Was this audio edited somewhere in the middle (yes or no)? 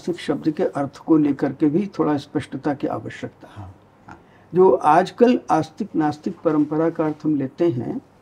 no